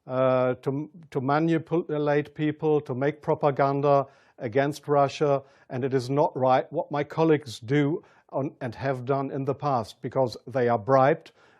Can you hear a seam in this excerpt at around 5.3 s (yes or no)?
yes